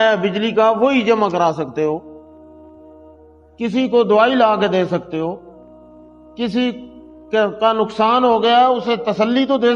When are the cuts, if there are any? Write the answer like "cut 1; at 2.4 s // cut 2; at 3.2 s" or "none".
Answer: cut 1; at 2.1 s // cut 2; at 3.5 s